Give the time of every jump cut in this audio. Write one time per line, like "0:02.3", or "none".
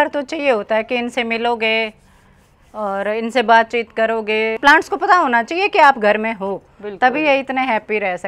0:04.6